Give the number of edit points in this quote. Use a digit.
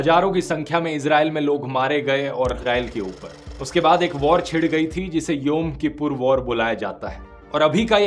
1